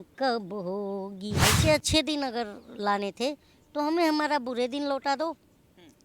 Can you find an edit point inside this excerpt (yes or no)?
yes